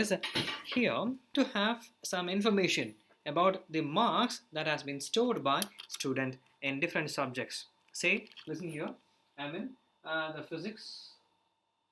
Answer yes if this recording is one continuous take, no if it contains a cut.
no